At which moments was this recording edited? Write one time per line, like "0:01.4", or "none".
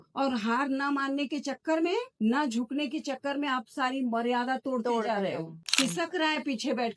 0:02.1
0:05.6